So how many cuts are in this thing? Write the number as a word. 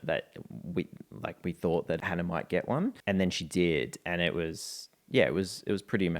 two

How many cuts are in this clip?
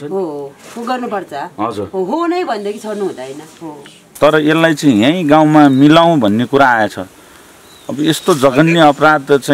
one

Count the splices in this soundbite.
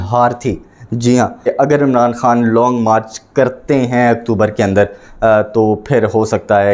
one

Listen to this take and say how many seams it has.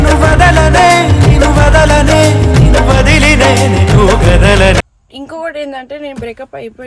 one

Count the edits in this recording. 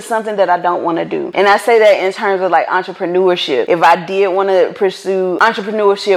three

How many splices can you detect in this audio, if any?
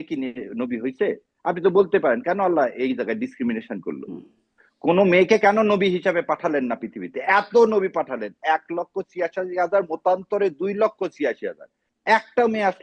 zero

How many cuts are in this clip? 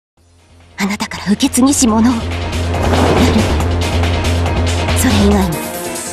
one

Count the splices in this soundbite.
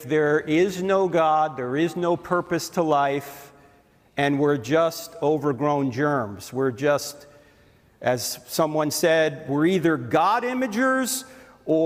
zero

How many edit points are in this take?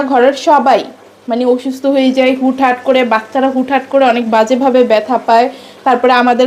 zero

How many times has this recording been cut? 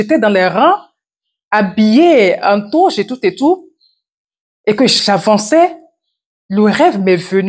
one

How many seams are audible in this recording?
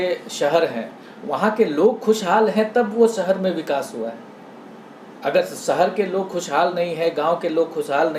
zero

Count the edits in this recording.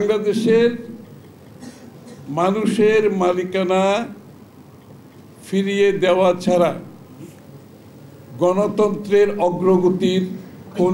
zero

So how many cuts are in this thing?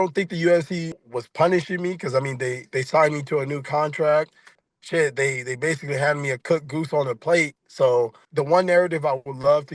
three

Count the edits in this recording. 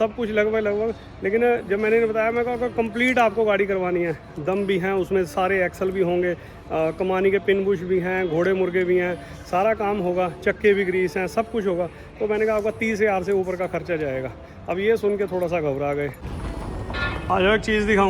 one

